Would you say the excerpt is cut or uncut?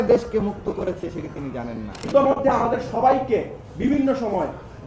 cut